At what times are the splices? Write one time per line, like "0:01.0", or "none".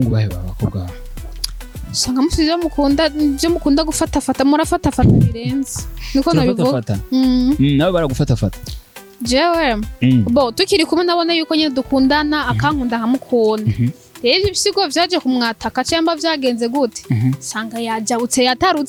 none